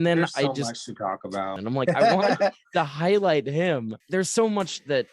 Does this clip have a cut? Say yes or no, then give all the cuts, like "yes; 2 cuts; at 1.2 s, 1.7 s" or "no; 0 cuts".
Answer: yes; 2 cuts; at 1.6 s, 4.0 s